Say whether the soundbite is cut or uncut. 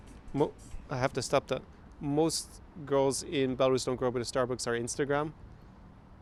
uncut